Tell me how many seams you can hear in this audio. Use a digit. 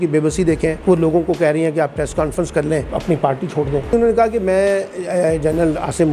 3